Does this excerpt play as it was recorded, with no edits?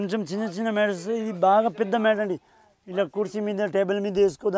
yes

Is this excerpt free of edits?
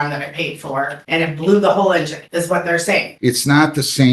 no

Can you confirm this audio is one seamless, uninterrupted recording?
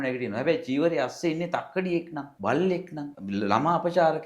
no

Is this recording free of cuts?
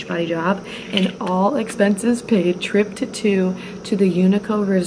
yes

